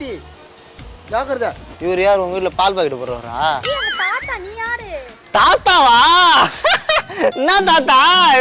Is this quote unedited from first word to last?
yes; 0 cuts

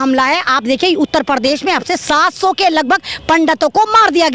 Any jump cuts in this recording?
no; 0 cuts

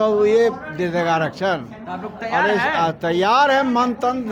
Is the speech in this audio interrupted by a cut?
no; 0 cuts

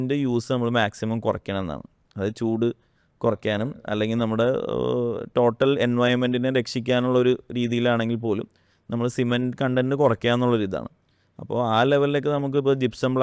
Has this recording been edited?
no; 0 cuts

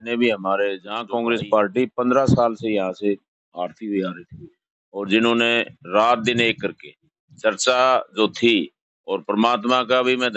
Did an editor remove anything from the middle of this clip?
yes; 1 cut; at 0.9 s

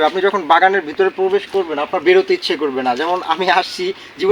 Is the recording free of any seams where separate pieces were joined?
yes; 0 cuts

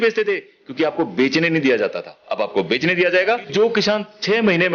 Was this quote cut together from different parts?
yes; 1 cut; at 3.5 s

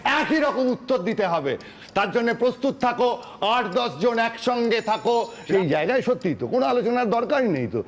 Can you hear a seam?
yes; 2 cuts; at 1.7 s, 5.4 s

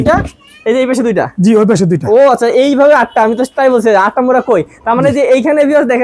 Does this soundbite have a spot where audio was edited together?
no; 0 cuts

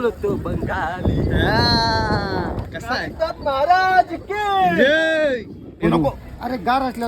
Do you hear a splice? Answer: yes; 1 cut; at 5.8 s

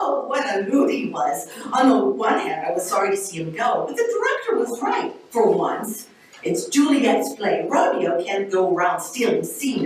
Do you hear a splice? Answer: no; 0 cuts

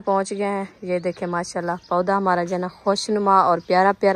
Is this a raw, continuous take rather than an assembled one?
yes; 0 cuts

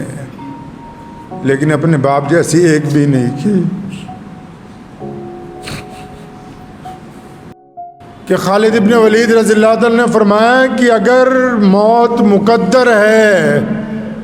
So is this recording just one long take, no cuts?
no; 1 cut; at 7.6 s

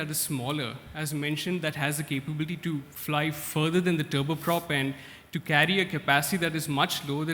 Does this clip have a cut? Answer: yes; 1 cut; at 2.9 s

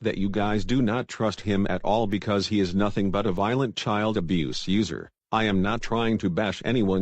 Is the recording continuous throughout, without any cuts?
no; 2 cuts; at 3.3 s, 4.9 s

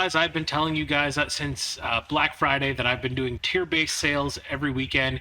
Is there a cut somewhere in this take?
yes; 1 cut; at 3.4 s

